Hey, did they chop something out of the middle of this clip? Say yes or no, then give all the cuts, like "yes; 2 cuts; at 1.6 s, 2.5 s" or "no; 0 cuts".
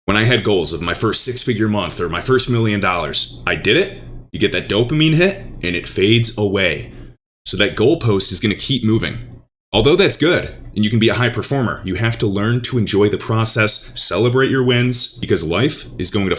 no; 0 cuts